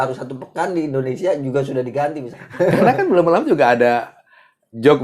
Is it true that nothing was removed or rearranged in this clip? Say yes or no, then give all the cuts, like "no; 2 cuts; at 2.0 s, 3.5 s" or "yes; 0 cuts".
no; 1 cut; at 2.3 s